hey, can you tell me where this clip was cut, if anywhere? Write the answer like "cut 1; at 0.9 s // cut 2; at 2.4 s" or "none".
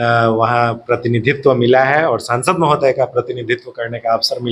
none